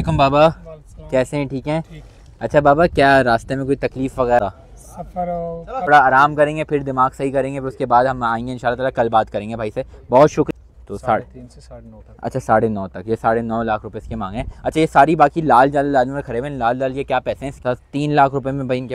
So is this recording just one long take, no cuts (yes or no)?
no